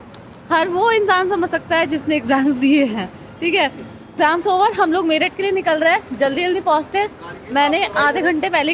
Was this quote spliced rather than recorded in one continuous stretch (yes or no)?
yes